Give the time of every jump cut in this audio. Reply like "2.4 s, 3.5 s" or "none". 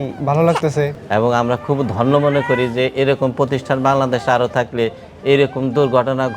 0.9 s